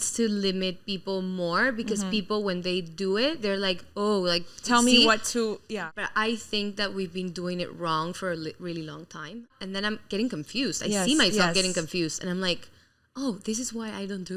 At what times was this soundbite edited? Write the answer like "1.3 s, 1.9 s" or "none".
5.7 s, 9.6 s